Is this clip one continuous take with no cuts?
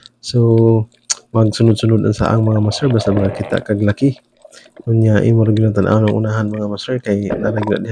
yes; 0 cuts

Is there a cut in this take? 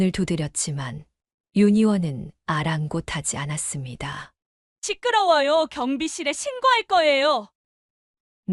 yes; 1 cut; at 7.5 s

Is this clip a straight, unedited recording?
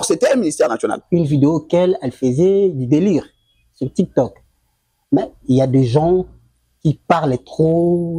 no; 1 cut; at 1.0 s

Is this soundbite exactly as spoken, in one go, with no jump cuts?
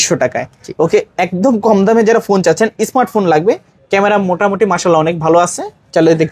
yes; 0 cuts

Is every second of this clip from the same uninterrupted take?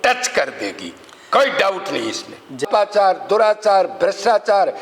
no; 1 cut; at 2.6 s

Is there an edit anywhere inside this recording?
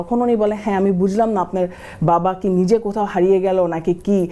no; 0 cuts

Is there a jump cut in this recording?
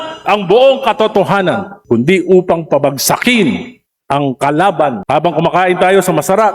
yes; 2 cuts; at 1.7 s, 5.0 s

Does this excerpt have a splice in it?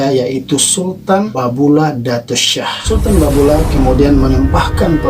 yes; 2 cuts; at 1.3 s, 2.8 s

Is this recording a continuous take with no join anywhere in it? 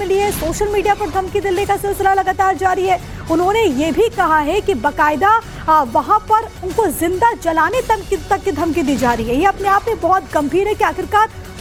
yes; 0 cuts

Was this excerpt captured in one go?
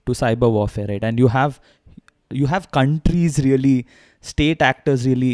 yes; 0 cuts

